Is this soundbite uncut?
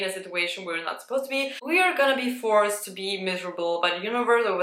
no; 1 cut; at 1.6 s

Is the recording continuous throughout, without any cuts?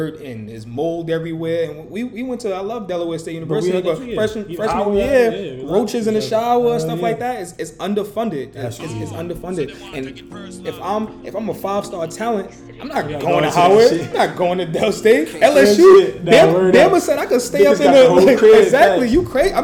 yes; 0 cuts

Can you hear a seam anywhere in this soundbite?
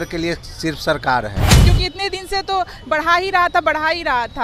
yes; 1 cut; at 1.6 s

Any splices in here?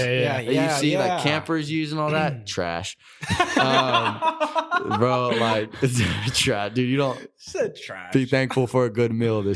no; 0 cuts

